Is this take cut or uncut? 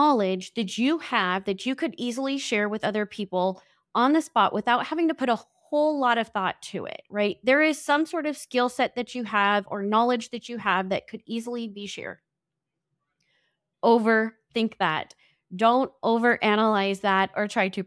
cut